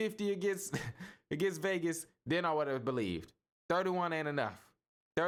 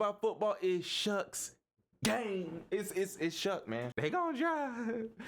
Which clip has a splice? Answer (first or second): second